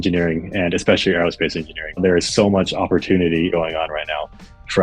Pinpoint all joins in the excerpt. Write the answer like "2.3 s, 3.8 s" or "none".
2.0 s, 3.5 s